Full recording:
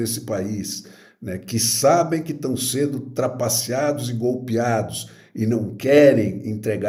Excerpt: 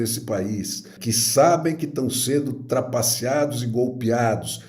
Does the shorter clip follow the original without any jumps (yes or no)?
no